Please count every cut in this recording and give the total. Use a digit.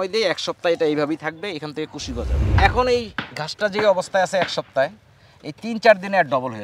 1